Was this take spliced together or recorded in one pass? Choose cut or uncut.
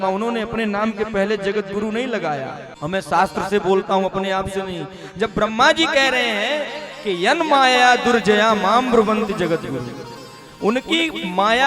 cut